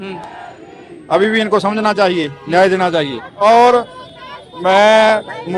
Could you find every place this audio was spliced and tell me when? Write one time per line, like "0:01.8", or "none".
0:03.2